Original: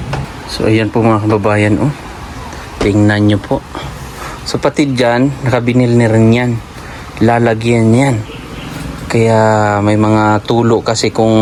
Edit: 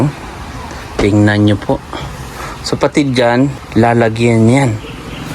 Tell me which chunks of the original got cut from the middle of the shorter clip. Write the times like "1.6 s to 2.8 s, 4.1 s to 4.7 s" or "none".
5.4 s to 7.0 s

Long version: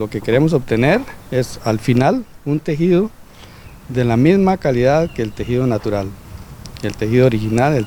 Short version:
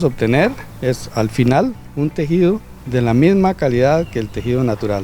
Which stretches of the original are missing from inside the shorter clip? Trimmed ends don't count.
3.2 s to 3.8 s

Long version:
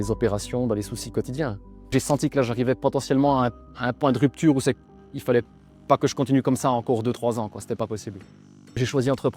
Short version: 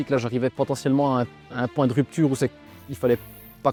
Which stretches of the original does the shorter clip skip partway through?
none

